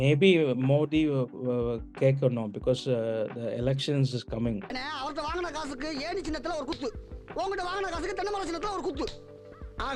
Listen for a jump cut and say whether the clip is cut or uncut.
uncut